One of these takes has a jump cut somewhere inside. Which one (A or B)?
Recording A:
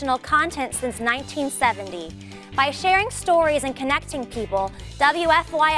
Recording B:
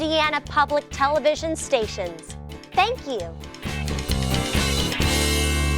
B